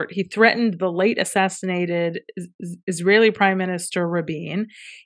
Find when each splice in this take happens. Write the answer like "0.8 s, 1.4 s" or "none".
none